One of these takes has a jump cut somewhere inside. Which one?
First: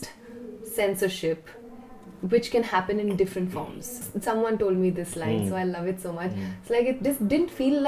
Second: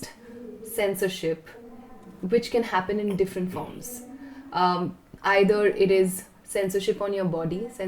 first; 1 cut; at 4.1 s

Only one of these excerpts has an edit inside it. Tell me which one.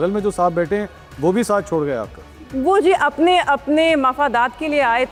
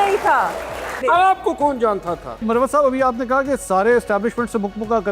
second; 2 cuts; at 1.0 s, 2.4 s

